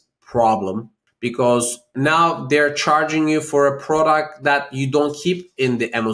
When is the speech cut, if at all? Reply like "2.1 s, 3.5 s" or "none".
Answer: 0.9 s, 1.9 s